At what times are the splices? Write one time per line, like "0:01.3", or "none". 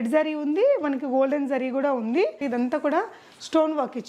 0:02.4